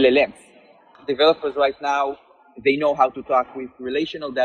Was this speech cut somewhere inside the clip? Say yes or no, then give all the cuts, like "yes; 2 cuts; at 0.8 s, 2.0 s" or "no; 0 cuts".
yes; 1 cut; at 0.9 s